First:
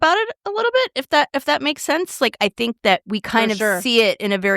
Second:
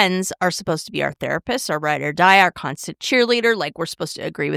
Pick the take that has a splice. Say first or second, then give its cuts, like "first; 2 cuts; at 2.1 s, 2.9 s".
first; 1 cut; at 3.1 s